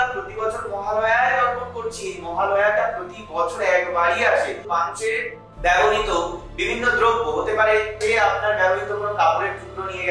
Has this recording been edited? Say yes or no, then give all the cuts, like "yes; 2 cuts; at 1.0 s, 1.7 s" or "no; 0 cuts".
yes; 2 cuts; at 4.6 s, 8.0 s